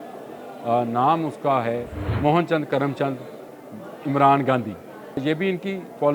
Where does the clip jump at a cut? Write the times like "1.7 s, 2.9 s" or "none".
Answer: 2.0 s, 5.2 s